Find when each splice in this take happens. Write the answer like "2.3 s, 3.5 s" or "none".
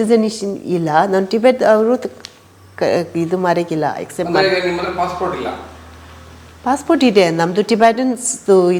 none